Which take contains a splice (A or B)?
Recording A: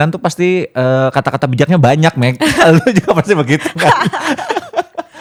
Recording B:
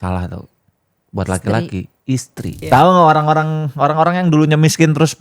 B